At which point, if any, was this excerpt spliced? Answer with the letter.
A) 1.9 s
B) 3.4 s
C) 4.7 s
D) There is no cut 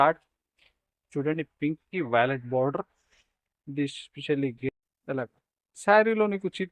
C